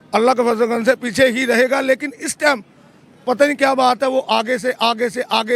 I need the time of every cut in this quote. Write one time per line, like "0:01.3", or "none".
none

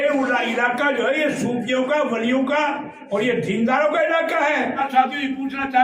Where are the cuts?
0:04.8

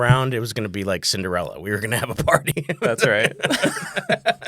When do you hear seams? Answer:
0:02.5

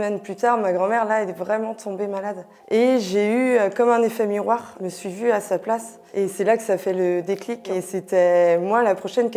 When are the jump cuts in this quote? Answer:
0:02.5
0:04.8
0:07.6

